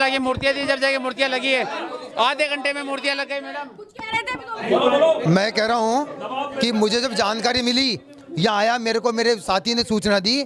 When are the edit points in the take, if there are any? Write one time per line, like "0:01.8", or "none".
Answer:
none